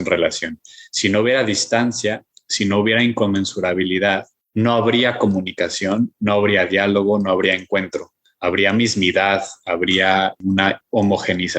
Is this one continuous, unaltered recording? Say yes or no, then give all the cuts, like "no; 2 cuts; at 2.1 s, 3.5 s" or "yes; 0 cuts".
no; 2 cuts; at 4.4 s, 10.5 s